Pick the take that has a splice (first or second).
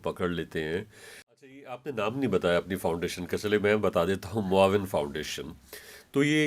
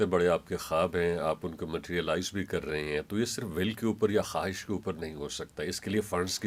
first